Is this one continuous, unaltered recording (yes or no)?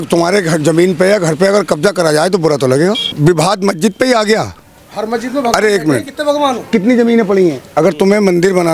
no